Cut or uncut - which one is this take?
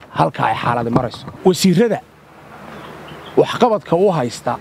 cut